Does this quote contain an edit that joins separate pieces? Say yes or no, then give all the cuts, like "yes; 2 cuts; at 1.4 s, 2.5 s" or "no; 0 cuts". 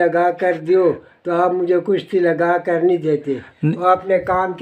no; 0 cuts